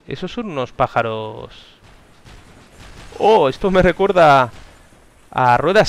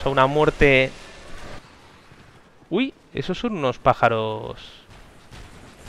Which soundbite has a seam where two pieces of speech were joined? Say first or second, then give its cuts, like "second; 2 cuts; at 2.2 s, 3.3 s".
second; 1 cut; at 1.6 s